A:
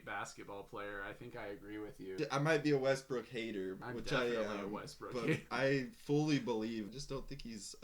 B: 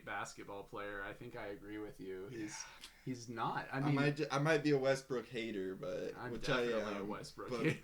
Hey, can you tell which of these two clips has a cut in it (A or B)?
A